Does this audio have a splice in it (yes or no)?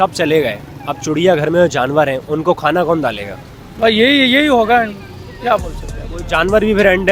no